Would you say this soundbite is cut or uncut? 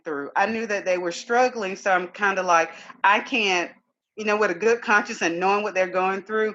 uncut